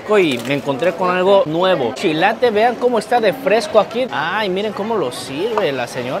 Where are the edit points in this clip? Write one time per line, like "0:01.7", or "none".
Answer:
0:02.0
0:04.1